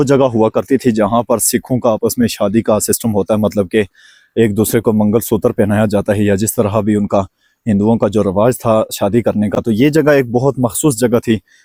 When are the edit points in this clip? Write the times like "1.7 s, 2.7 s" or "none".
none